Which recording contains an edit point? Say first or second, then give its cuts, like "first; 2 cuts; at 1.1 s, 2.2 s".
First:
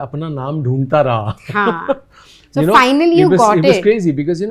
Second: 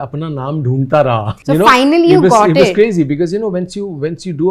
second; 1 cut; at 1.3 s